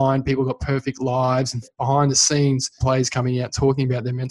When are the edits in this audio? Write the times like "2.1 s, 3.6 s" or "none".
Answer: 1.7 s, 2.8 s